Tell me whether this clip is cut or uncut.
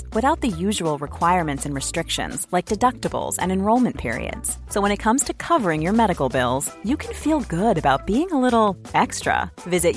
uncut